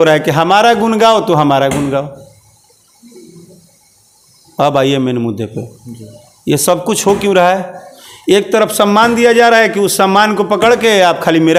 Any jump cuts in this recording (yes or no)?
no